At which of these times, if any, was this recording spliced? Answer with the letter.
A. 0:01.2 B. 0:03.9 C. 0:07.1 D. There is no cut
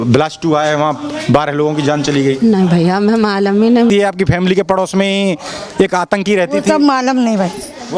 B